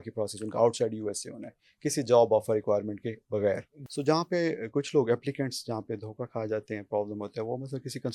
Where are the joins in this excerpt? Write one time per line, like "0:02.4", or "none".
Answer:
0:03.8

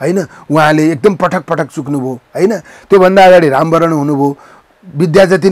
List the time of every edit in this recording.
none

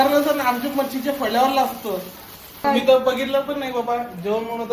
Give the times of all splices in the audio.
0:02.6

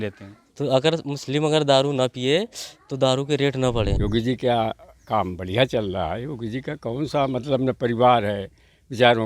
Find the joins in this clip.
0:03.9

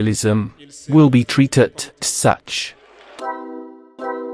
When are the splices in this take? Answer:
0:03.1

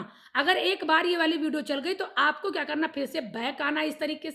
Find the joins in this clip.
none

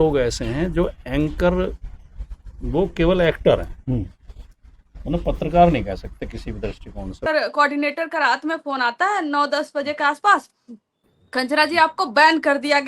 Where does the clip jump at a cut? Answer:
0:07.3

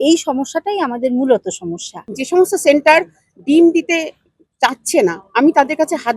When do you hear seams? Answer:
0:02.1

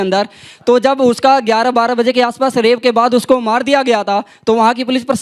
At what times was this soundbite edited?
none

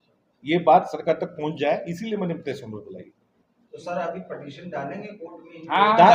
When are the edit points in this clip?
none

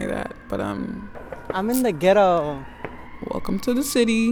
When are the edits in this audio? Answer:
none

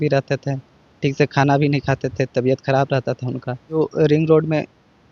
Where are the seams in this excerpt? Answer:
0:03.8

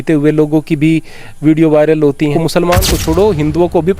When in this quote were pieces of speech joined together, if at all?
0:02.3

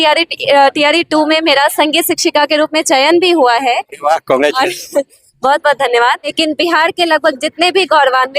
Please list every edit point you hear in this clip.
0:06.3

